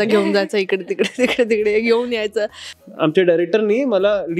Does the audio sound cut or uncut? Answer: cut